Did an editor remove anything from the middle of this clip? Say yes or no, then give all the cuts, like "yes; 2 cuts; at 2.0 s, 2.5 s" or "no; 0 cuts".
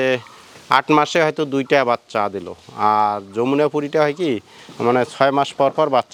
no; 0 cuts